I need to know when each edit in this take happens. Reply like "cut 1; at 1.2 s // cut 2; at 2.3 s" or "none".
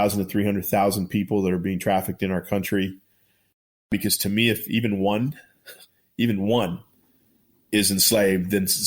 cut 1; at 3.9 s

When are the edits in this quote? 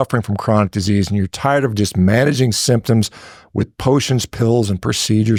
none

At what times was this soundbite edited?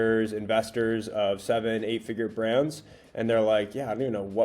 none

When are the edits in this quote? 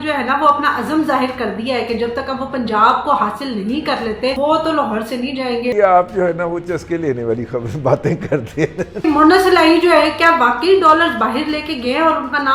cut 1; at 4.4 s // cut 2; at 5.7 s // cut 3; at 9.0 s

